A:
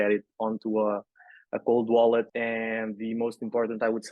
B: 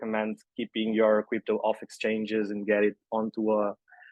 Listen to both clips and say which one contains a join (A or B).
A